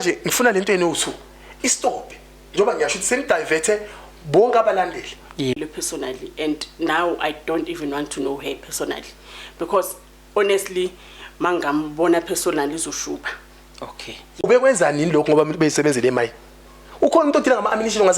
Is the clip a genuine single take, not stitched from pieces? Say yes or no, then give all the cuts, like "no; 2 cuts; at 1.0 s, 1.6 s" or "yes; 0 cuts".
no; 2 cuts; at 5.6 s, 14.4 s